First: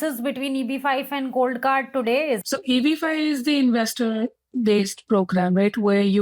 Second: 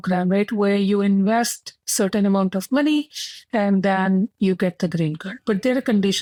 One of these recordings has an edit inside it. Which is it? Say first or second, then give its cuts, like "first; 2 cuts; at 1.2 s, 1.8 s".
first; 1 cut; at 2.4 s